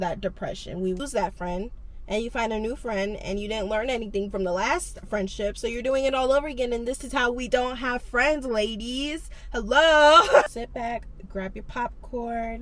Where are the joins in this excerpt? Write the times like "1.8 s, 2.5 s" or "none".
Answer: 1.0 s, 10.5 s